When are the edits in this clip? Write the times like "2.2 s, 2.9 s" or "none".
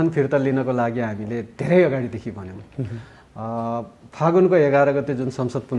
none